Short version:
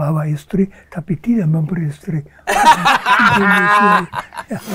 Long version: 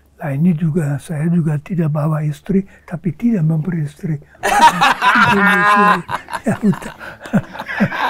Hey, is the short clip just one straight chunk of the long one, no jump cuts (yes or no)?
yes